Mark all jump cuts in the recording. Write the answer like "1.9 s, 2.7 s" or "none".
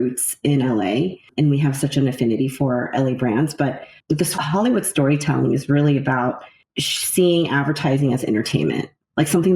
4.3 s